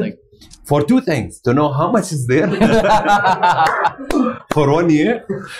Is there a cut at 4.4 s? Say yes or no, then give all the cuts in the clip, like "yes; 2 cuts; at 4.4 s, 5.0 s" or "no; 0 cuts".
no; 0 cuts